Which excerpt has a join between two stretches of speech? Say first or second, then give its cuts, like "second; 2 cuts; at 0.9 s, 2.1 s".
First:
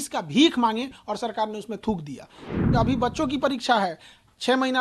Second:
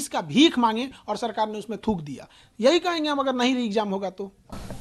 first; 1 cut; at 2.6 s